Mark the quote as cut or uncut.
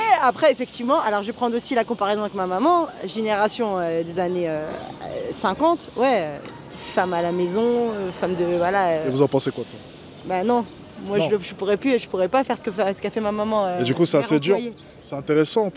uncut